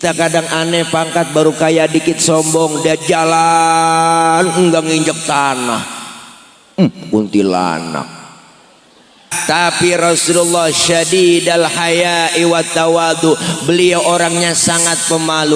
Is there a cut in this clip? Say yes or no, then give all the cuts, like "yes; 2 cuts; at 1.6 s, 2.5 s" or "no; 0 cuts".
yes; 1 cut; at 9.3 s